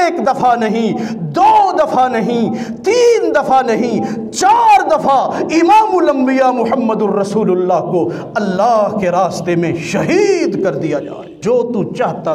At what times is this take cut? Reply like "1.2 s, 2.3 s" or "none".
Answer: 11.3 s